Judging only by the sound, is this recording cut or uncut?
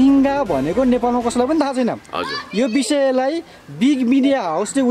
uncut